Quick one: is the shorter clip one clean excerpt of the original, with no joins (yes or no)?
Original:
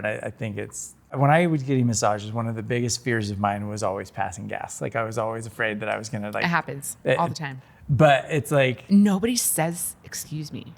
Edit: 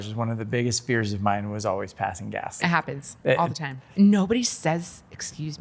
no